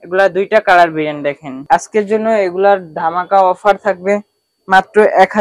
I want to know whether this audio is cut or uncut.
cut